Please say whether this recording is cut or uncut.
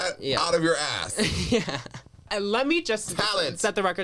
cut